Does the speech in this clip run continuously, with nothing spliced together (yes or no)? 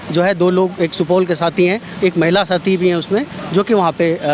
yes